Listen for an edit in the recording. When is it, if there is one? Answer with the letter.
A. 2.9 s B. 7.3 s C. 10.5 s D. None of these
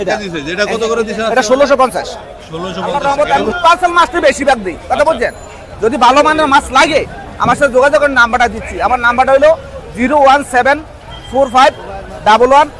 A